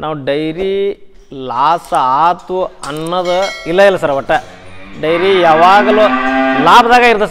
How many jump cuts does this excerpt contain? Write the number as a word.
zero